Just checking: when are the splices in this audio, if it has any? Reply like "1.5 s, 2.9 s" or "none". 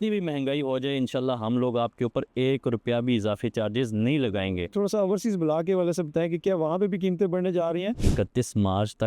4.7 s, 8.0 s